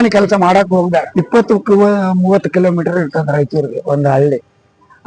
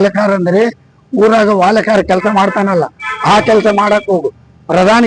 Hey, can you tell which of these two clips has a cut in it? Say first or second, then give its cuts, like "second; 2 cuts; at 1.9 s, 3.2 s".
first; 1 cut; at 1.1 s